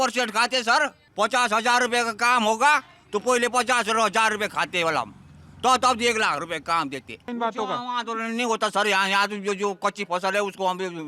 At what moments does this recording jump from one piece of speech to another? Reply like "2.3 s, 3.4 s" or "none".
1.0 s, 7.3 s